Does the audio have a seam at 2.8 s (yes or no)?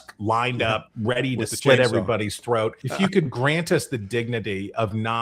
yes